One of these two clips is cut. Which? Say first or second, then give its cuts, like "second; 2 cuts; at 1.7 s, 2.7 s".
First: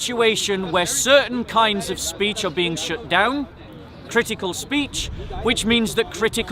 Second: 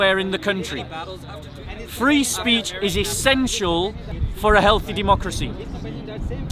second; 1 cut; at 4.2 s